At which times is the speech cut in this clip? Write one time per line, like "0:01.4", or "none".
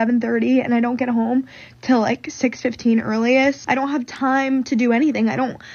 0:03.6